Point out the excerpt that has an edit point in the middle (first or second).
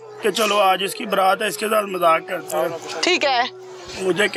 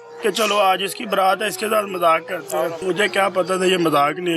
second